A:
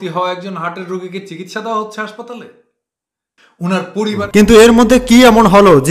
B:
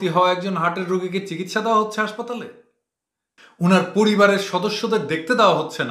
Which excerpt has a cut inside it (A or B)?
A